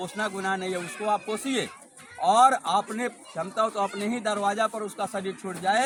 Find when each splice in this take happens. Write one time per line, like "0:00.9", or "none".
none